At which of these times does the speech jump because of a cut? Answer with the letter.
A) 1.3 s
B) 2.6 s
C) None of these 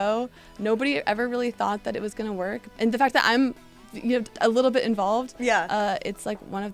B